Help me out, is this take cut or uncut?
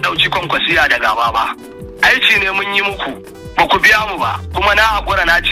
uncut